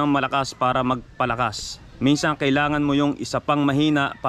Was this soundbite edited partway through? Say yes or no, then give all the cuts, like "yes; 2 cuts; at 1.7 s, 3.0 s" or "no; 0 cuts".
no; 0 cuts